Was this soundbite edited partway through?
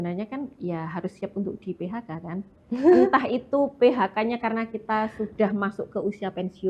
no; 0 cuts

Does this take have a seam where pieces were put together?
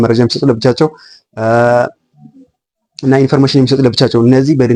no; 0 cuts

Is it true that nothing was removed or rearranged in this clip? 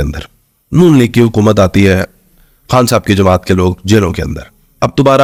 yes; 0 cuts

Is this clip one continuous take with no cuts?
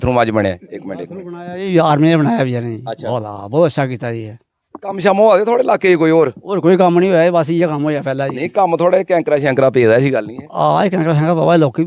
yes; 0 cuts

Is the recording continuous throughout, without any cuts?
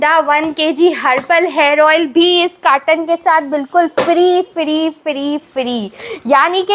yes; 0 cuts

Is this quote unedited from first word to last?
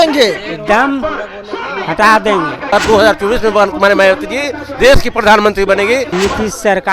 no; 2 cuts; at 2.7 s, 6.1 s

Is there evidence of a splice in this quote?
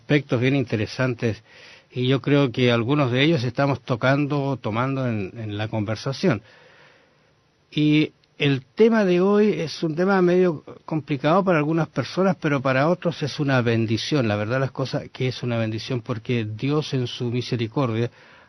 yes; 1 cut; at 4.6 s

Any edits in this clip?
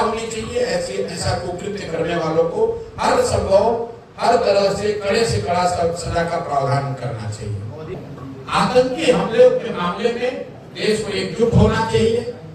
yes; 1 cut; at 8.0 s

